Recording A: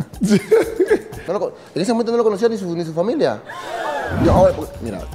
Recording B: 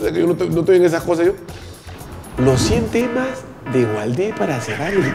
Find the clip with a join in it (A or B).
A